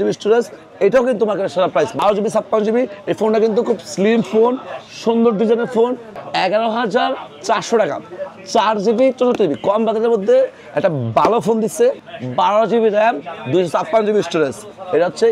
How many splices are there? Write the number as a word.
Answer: three